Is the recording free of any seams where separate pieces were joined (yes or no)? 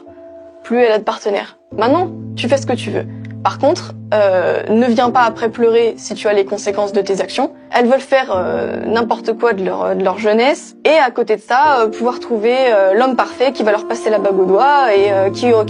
no